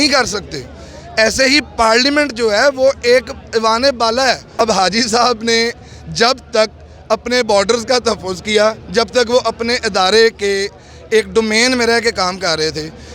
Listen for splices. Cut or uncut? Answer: cut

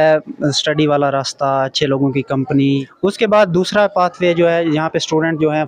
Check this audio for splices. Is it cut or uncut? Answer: cut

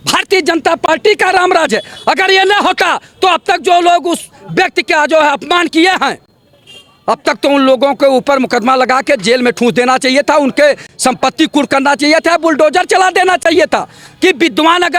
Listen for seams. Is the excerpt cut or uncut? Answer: uncut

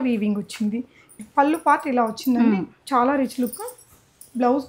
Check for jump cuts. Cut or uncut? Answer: cut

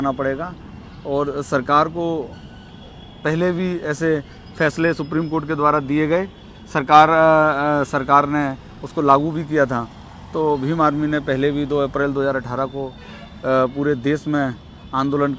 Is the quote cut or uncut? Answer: uncut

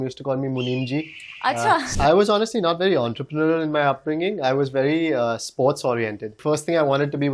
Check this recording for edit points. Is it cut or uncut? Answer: cut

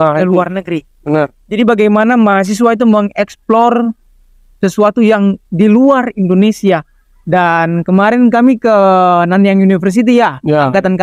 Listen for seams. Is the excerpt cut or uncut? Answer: uncut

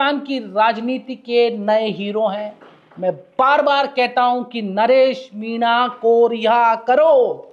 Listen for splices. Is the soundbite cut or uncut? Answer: uncut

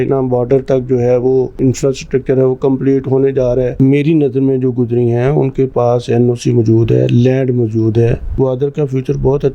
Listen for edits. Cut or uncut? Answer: cut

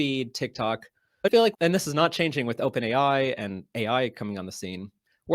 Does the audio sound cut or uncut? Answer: cut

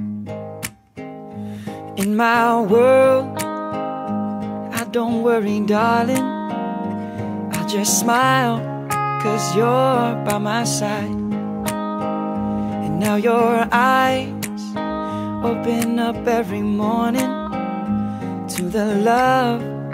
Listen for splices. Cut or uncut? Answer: cut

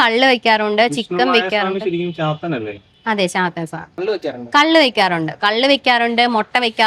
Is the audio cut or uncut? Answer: cut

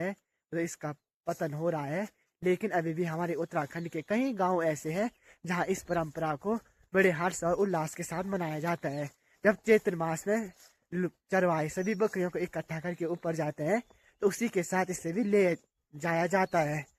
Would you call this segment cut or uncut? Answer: uncut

